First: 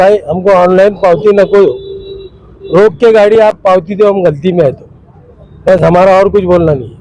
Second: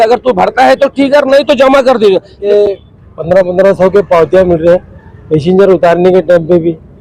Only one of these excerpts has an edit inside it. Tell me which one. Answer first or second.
second